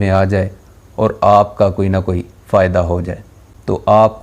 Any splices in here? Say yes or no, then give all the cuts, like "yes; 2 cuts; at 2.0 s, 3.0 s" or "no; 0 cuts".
yes; 1 cut; at 3.3 s